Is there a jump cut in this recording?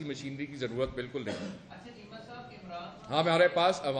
no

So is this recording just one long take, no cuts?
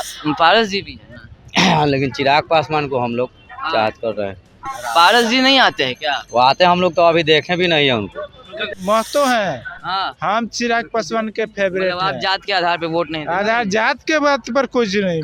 no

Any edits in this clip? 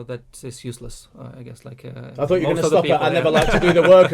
no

